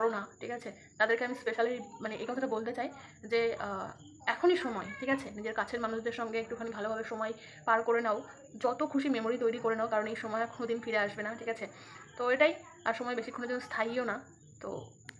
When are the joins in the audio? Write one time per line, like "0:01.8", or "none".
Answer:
none